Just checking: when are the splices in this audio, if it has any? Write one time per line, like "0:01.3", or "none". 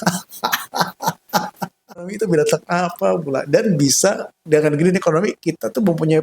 0:02.1